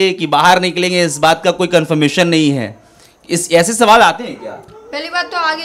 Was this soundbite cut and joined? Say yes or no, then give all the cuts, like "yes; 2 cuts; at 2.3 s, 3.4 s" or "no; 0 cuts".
no; 0 cuts